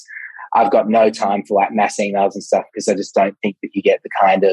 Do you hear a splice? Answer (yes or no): no